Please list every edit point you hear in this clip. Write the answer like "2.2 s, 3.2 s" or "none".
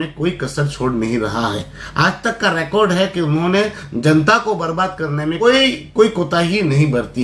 none